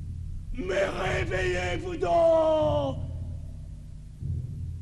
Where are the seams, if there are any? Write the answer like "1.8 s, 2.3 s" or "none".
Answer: none